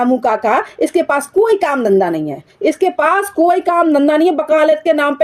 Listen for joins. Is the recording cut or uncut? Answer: uncut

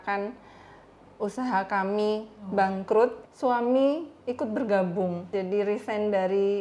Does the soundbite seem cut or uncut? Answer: cut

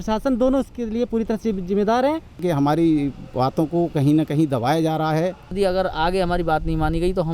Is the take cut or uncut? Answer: cut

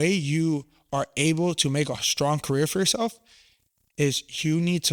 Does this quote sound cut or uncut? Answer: uncut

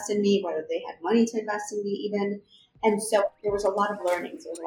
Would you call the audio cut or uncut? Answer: uncut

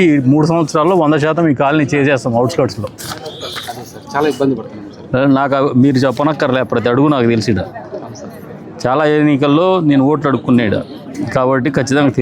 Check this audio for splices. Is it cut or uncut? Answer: uncut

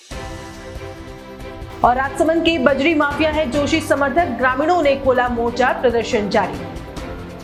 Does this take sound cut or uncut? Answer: uncut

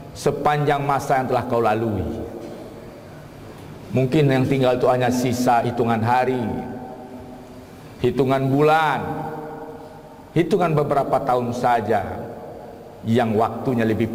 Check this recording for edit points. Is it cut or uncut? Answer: uncut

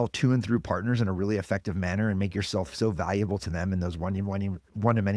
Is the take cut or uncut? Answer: uncut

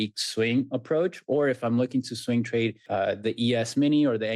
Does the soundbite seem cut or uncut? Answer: cut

